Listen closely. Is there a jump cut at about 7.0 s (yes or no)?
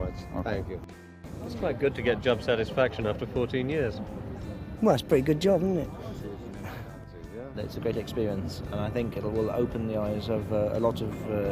yes